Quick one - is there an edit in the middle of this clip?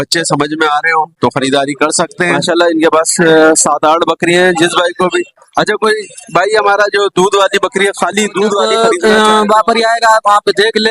yes; 2 cuts; at 2.4 s, 8.7 s

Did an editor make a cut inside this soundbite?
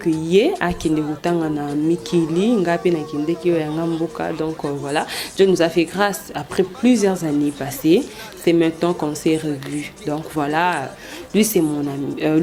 no; 0 cuts

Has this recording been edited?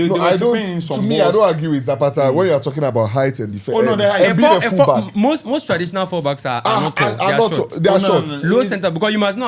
no; 0 cuts

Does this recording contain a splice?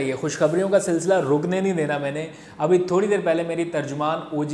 no; 0 cuts

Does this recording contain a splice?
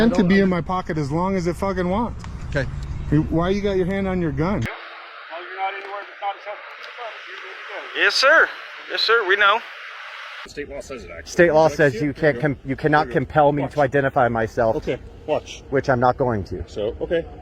yes; 2 cuts; at 4.7 s, 10.5 s

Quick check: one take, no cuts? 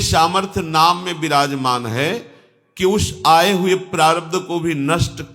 yes; 0 cuts

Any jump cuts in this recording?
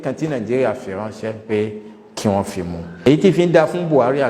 yes; 1 cut; at 2.9 s

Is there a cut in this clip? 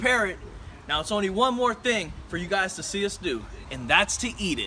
no; 0 cuts

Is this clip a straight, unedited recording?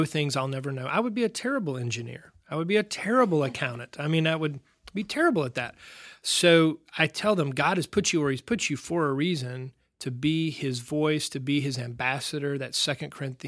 yes; 0 cuts

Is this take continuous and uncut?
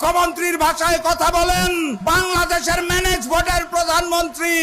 no; 1 cut; at 2.0 s

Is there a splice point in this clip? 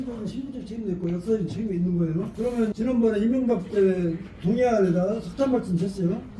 yes; 1 cut; at 2.7 s

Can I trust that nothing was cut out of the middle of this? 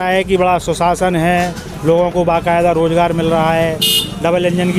yes; 0 cuts

